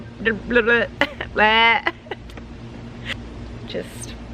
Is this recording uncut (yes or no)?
no